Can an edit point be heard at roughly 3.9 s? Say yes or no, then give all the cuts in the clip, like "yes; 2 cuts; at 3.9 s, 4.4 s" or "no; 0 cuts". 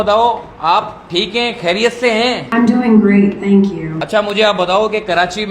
yes; 2 cuts; at 2.4 s, 3.9 s